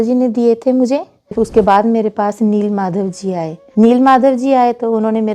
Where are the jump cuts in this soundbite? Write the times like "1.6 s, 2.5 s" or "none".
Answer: 1.3 s, 3.6 s